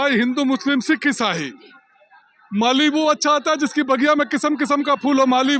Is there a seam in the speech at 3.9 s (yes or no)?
no